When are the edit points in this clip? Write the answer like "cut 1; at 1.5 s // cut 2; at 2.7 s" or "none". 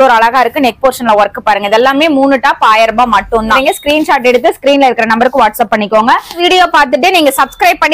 cut 1; at 3.6 s // cut 2; at 6.4 s

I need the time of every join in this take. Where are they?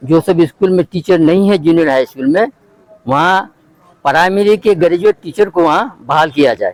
none

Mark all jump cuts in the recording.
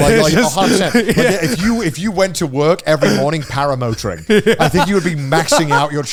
none

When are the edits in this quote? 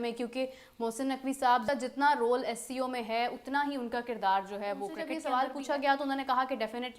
cut 1; at 5.1 s

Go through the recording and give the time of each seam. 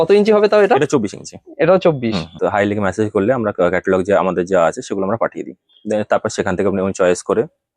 cut 1; at 2.3 s

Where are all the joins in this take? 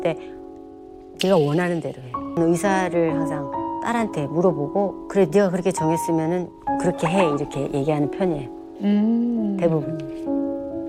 cut 1; at 2.4 s

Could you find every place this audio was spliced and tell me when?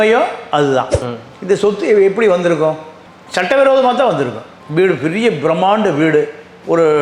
cut 1; at 0.9 s

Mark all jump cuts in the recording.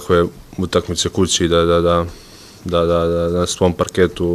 cut 1; at 1.6 s

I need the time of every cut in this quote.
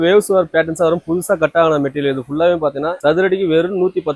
none

